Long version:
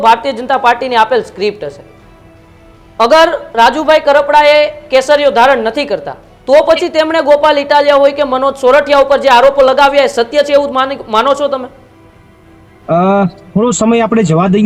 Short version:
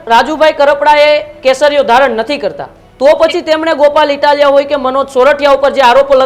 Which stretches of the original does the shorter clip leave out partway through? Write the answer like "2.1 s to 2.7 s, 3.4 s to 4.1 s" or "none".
none